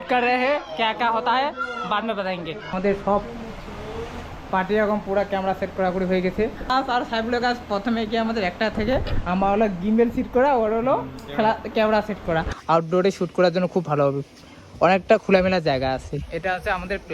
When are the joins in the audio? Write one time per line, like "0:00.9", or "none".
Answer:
0:02.7
0:06.7
0:12.5